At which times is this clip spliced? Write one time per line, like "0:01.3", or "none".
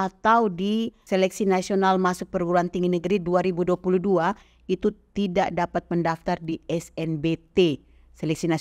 0:01.0